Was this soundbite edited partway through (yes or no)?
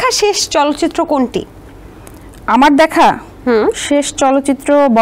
no